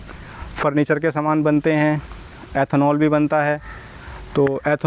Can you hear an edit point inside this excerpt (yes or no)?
no